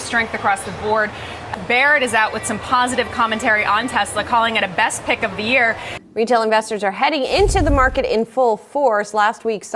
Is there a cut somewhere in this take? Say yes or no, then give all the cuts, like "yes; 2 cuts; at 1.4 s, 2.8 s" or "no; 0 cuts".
yes; 2 cuts; at 1.3 s, 5.9 s